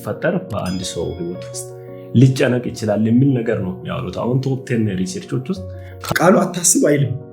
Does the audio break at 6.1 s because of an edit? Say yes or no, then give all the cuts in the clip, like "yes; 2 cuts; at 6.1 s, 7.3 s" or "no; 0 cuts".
yes; 1 cut; at 6.1 s